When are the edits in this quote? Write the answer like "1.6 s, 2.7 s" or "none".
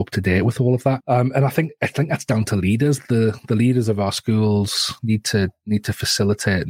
1.0 s, 4.9 s